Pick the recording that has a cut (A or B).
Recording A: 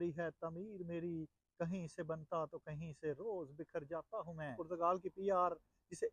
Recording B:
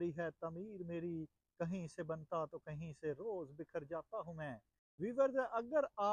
A